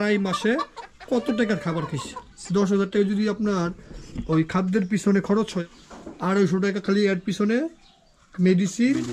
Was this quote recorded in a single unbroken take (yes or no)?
no